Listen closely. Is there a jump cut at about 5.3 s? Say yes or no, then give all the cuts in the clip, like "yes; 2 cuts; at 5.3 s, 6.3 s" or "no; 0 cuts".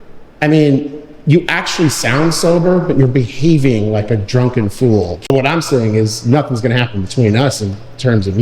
yes; 1 cut; at 5.3 s